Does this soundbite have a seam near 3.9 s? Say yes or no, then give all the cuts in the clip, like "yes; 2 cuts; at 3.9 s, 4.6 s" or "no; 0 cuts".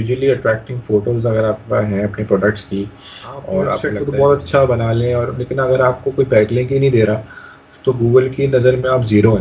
yes; 1 cut; at 3.9 s